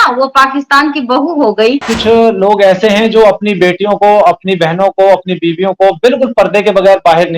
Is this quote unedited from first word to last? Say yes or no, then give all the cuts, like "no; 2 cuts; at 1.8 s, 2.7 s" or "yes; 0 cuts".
no; 1 cut; at 1.9 s